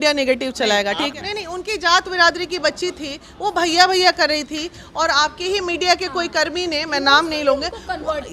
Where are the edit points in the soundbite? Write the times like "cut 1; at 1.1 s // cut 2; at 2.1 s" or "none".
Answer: cut 1; at 1.1 s